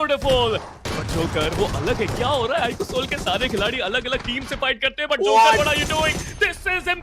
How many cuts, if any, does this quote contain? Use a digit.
0